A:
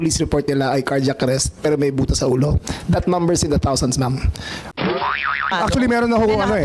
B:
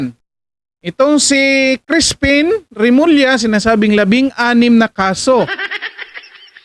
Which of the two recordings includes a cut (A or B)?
A